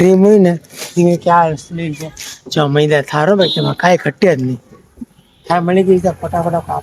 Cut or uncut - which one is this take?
uncut